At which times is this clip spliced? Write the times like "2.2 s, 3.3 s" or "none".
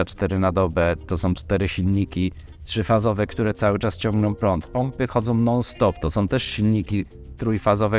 none